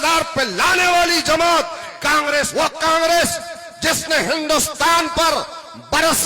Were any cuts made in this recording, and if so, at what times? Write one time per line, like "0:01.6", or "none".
0:02.5